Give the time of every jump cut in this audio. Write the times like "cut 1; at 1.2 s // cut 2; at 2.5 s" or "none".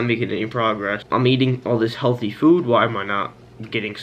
cut 1; at 1.0 s